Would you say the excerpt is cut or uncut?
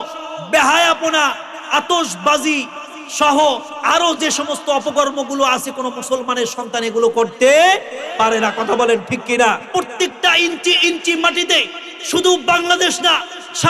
cut